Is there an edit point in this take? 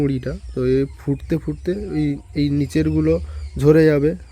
no; 0 cuts

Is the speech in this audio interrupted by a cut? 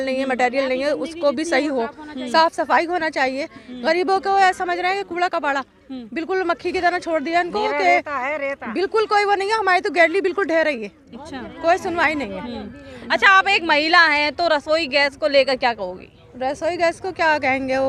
no; 0 cuts

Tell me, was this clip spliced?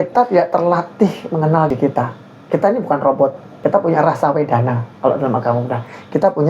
yes; 2 cuts; at 1.7 s, 3.5 s

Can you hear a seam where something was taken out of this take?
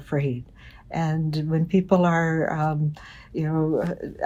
no; 0 cuts

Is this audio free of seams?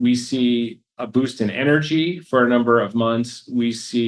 no; 1 cut; at 0.9 s

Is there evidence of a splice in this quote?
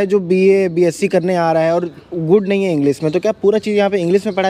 no; 0 cuts

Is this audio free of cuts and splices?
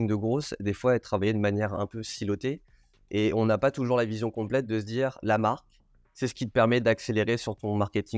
yes; 0 cuts

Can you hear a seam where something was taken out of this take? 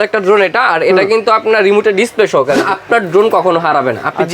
yes; 1 cut; at 2.6 s

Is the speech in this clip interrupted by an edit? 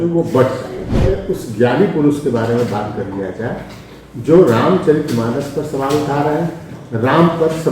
yes; 1 cut; at 1.0 s

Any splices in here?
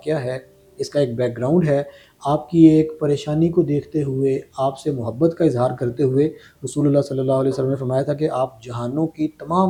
no; 0 cuts

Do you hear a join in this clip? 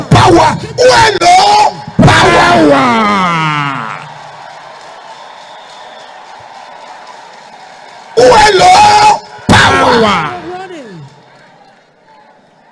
no; 0 cuts

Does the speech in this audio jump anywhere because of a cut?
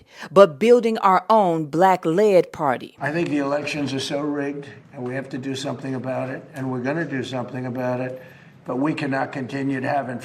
yes; 1 cut; at 2.9 s

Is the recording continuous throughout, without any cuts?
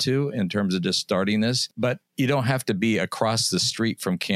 no; 1 cut; at 1.7 s

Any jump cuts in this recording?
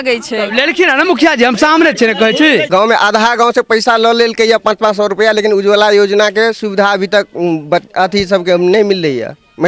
yes; 1 cut; at 2.7 s

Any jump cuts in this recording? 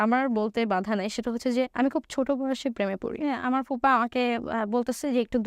yes; 1 cut; at 3.3 s

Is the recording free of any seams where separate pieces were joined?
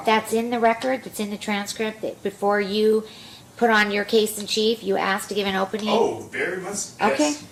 yes; 0 cuts

